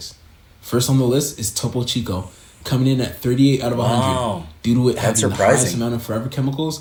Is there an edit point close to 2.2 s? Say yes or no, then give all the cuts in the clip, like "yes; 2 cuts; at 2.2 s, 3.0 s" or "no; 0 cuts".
no; 0 cuts